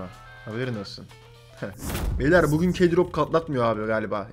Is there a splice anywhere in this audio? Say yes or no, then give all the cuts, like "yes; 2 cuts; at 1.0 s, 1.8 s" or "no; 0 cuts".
yes; 1 cut; at 2.2 s